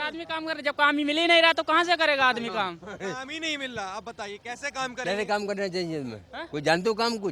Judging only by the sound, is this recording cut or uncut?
uncut